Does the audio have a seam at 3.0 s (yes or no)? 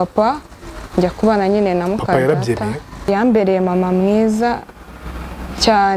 yes